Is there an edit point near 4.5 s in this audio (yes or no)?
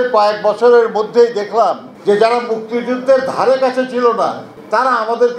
yes